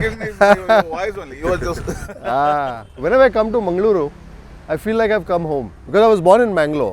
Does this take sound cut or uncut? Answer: uncut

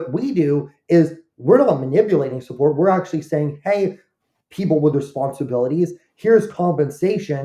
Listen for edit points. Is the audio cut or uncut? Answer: uncut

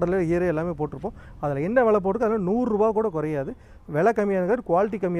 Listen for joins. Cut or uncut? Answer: cut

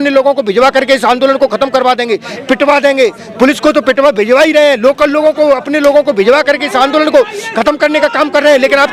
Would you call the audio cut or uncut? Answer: uncut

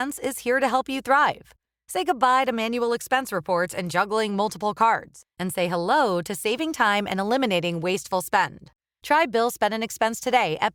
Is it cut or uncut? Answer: uncut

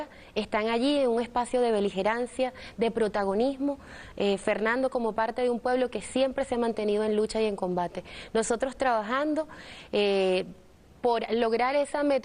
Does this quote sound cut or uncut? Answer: uncut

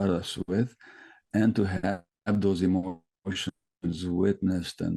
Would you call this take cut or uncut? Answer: uncut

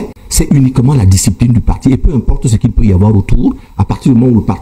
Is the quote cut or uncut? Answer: uncut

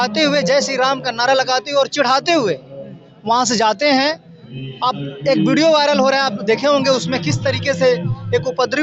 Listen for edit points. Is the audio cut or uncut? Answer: uncut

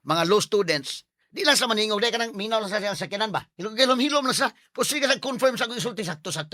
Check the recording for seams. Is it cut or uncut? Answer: uncut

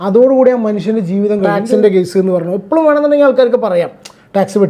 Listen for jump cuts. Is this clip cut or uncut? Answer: cut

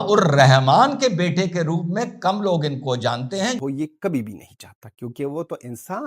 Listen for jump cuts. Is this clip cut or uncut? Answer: cut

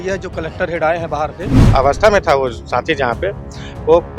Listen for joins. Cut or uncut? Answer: cut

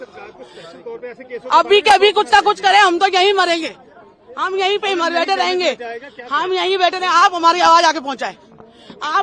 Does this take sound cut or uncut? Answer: uncut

